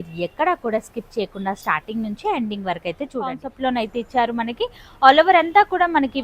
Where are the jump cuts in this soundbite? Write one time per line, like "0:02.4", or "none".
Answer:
0:03.5